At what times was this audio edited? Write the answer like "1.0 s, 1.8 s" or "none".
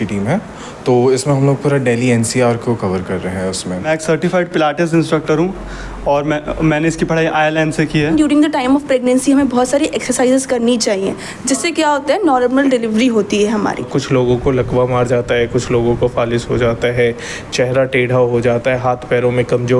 3.9 s, 8.1 s, 13.8 s

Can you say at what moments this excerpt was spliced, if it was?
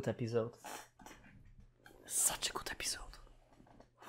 none

